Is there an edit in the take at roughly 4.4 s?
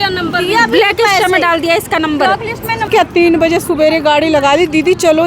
no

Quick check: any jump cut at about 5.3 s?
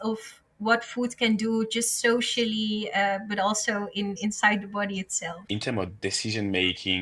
yes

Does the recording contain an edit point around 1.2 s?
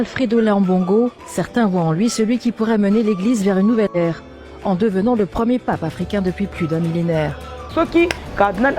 yes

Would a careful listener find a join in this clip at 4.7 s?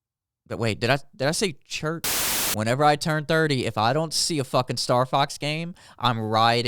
no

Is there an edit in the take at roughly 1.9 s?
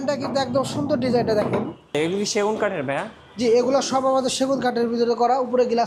yes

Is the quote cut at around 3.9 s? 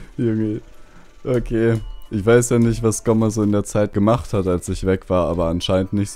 yes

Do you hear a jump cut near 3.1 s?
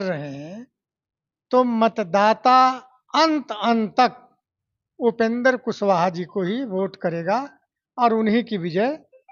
no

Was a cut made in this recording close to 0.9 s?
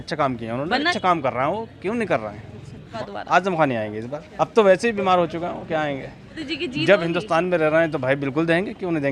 yes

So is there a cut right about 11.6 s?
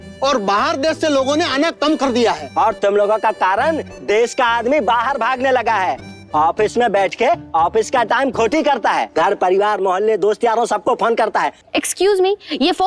yes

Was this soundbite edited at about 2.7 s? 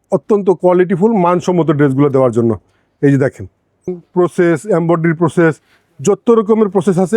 no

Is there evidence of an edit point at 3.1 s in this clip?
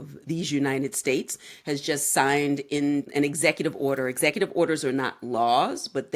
yes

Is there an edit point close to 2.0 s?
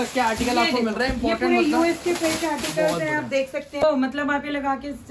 no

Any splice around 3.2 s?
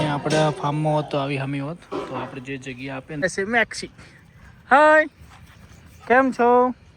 yes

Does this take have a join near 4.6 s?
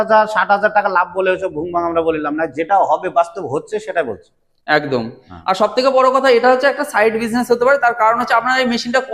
no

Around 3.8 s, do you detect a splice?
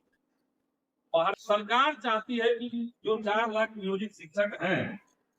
no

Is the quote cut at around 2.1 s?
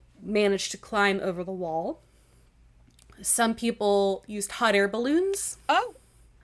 no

